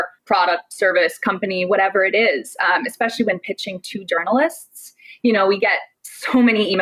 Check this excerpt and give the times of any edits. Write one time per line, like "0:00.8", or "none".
none